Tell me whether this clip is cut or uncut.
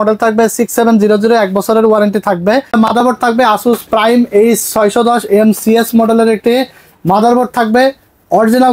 cut